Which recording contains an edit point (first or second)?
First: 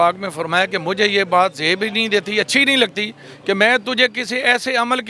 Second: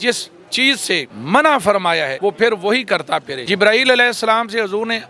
second